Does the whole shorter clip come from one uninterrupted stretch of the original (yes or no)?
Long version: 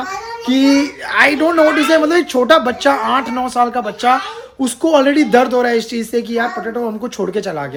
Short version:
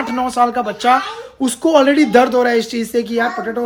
yes